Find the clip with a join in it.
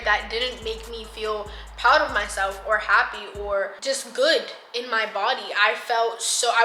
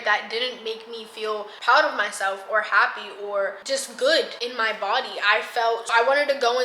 second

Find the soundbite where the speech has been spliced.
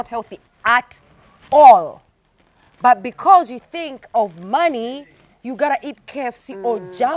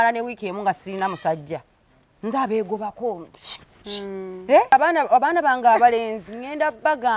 second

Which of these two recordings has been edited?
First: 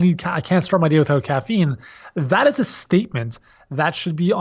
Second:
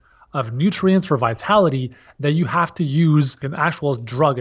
second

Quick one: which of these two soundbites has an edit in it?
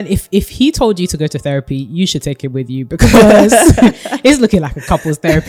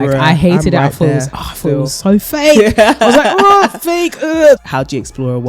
second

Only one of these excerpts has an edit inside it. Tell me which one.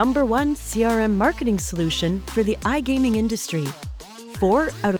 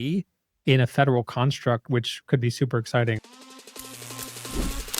second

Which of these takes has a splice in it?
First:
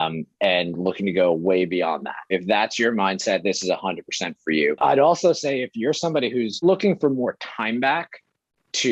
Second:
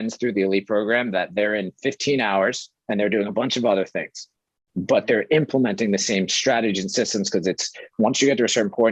first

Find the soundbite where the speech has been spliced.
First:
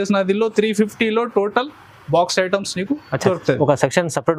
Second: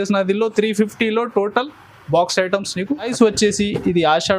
second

